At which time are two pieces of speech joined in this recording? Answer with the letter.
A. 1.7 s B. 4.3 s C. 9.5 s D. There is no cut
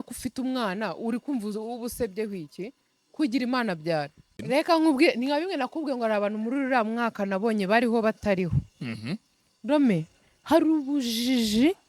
B